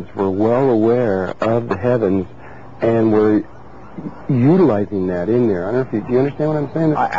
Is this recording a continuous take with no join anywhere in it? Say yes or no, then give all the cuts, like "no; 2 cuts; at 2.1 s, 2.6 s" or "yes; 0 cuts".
no; 1 cut; at 2.1 s